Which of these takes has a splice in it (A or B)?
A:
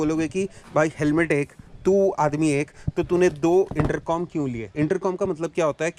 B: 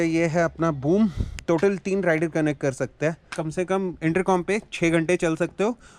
B